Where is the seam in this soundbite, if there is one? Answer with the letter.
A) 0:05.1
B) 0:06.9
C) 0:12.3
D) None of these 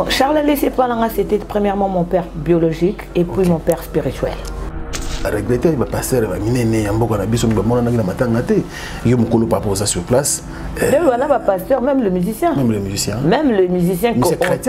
A